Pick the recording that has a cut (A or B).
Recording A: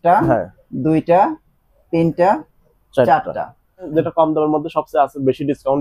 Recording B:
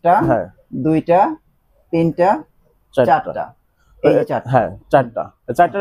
A